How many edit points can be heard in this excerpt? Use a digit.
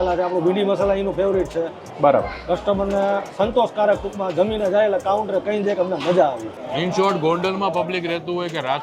1